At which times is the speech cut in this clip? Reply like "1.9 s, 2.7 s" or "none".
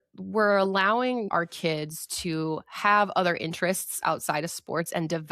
1.3 s